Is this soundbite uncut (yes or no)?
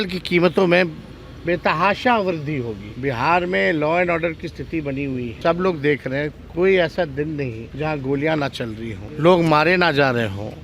no